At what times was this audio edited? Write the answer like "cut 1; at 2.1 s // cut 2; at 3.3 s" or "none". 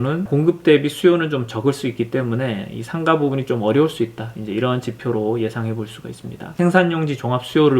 cut 1; at 6.5 s